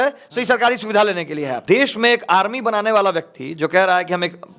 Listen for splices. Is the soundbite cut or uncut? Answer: cut